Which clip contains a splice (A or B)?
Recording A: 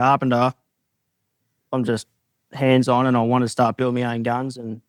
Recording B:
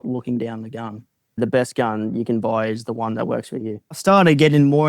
B